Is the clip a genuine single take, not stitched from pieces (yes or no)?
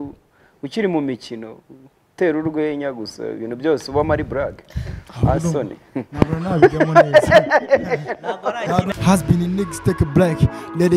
no